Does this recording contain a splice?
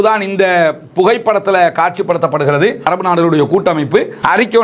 yes; 1 cut; at 2.9 s

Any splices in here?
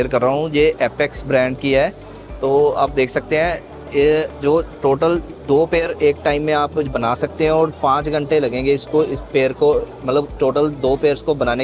no; 0 cuts

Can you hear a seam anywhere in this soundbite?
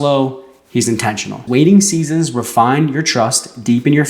yes; 1 cut; at 1.4 s

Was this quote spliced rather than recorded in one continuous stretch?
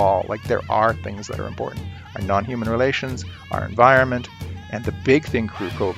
no; 0 cuts

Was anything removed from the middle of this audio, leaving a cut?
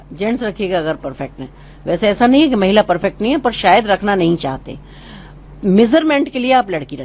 no; 0 cuts

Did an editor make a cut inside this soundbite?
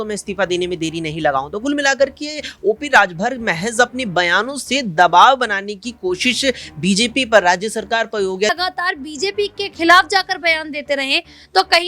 yes; 1 cut; at 8.5 s

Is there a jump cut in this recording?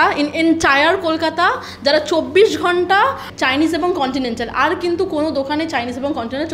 yes; 1 cut; at 3.2 s

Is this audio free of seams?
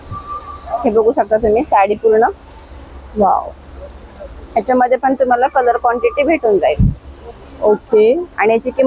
yes; 0 cuts

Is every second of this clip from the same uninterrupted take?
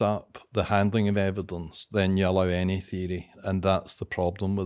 no; 1 cut; at 3.4 s

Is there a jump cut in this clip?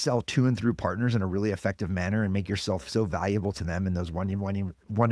no; 0 cuts

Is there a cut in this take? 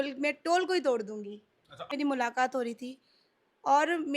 yes; 1 cut; at 1.9 s

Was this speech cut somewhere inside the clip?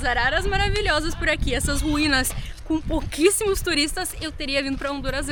no; 0 cuts

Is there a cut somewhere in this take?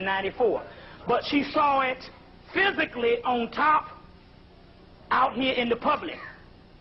no; 0 cuts

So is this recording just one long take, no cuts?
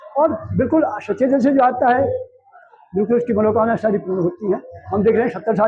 yes; 0 cuts

